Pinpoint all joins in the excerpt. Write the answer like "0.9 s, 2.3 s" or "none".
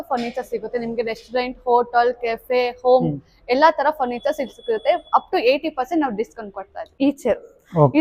6.8 s